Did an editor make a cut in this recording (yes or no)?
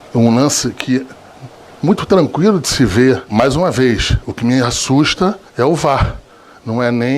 yes